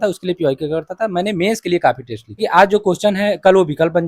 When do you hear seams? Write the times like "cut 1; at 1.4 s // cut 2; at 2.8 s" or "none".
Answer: cut 1; at 2.3 s

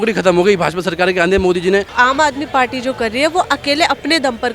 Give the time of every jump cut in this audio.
cut 1; at 1.9 s

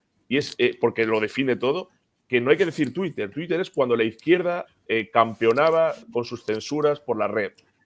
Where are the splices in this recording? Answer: none

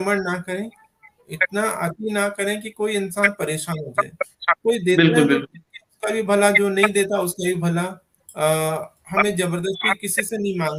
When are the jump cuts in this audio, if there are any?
none

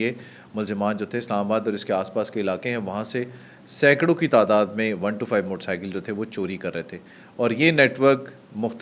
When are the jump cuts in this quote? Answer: none

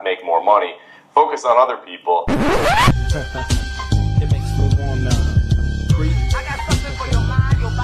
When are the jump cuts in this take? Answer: cut 1; at 2.2 s

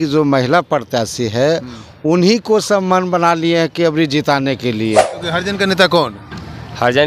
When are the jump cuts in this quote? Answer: cut 1; at 5.2 s

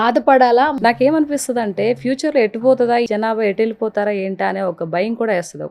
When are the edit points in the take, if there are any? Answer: cut 1; at 0.7 s // cut 2; at 3.1 s

